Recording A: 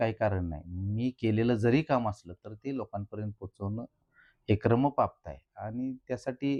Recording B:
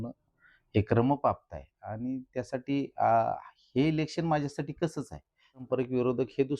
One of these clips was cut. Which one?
B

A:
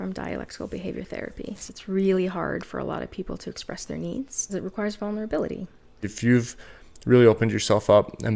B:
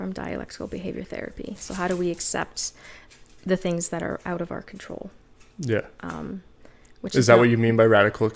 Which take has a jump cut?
A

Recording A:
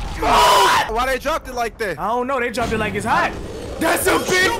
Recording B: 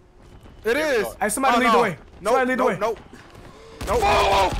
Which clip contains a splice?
A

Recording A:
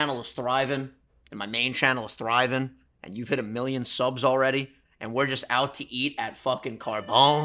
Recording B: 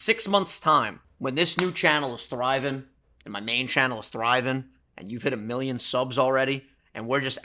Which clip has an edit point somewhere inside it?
B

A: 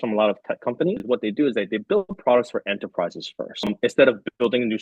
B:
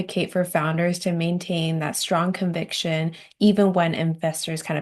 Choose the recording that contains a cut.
A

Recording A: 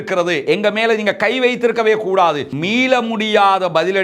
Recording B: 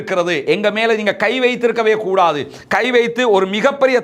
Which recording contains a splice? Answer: A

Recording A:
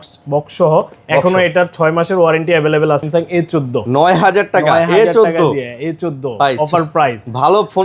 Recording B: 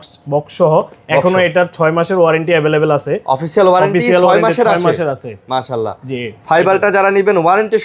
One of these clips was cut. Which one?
A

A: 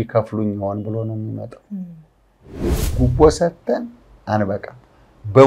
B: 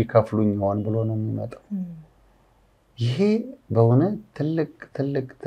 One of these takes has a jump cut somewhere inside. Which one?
A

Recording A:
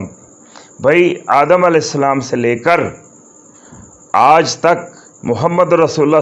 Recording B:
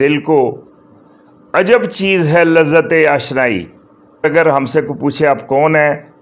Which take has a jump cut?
B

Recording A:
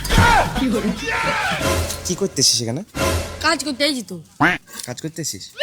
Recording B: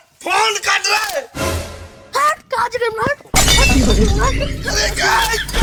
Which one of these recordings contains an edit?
A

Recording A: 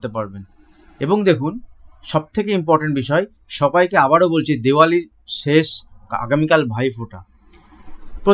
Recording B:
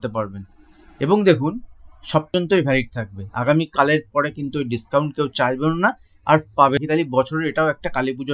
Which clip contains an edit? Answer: B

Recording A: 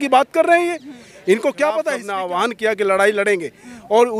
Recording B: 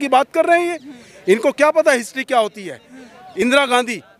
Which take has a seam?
A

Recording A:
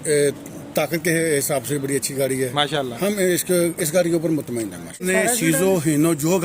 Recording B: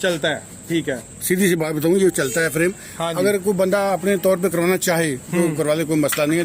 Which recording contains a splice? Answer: A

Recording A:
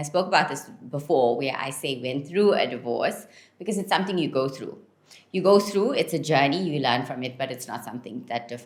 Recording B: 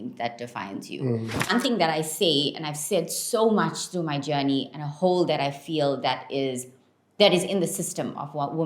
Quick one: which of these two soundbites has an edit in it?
B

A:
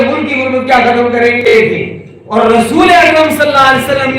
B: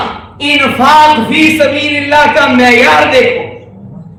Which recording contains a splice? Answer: A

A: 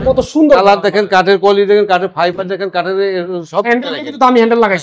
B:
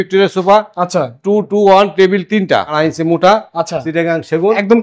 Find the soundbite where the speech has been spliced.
B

